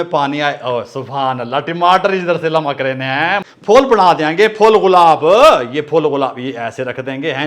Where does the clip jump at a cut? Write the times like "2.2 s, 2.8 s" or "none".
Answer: 3.4 s